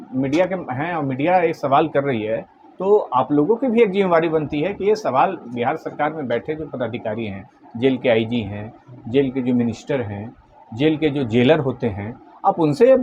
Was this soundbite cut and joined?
no; 0 cuts

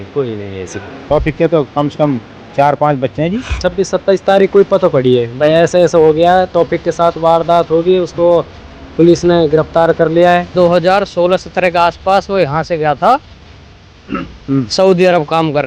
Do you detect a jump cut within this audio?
yes; 3 cuts; at 1.0 s, 3.6 s, 10.5 s

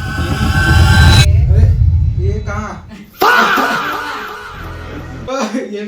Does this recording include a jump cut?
yes; 2 cuts; at 3.0 s, 4.9 s

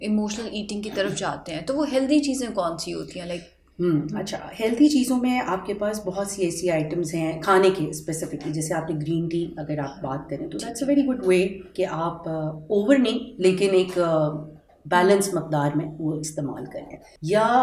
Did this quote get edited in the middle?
no; 0 cuts

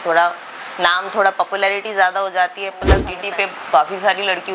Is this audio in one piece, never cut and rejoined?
no; 1 cut; at 3.1 s

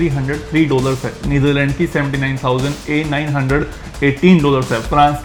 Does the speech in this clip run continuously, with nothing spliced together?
yes; 0 cuts

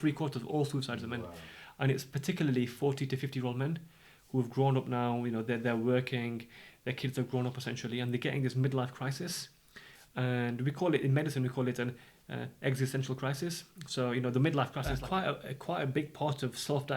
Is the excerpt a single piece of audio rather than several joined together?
no; 1 cut; at 14.8 s

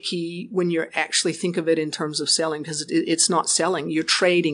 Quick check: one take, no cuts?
yes; 0 cuts

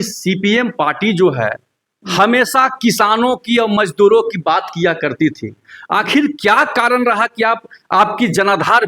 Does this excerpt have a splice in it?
no; 0 cuts

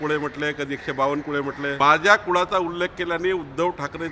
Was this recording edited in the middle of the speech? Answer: yes; 1 cut; at 1.8 s

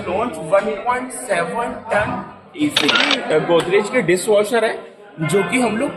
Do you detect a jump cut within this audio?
yes; 1 cut; at 3.1 s

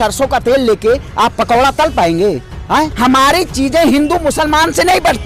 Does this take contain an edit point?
yes; 1 cut; at 2.9 s

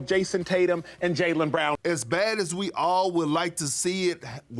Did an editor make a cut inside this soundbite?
yes; 1 cut; at 1.8 s

